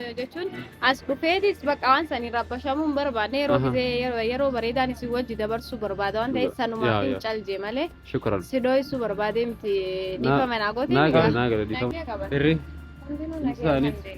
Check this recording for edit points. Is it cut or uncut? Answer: cut